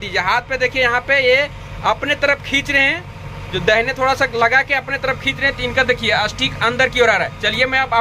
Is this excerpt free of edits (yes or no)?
yes